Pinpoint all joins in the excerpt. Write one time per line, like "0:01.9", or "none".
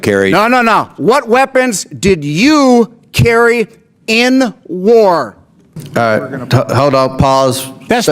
0:05.8